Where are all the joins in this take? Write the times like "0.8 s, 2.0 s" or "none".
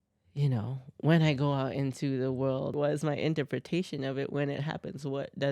2.7 s